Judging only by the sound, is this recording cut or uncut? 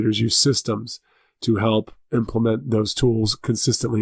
uncut